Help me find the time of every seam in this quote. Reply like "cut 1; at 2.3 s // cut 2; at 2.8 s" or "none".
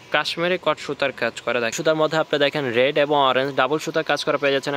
cut 1; at 1.7 s